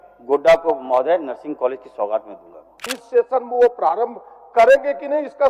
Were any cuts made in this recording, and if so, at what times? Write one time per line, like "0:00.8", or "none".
0:02.9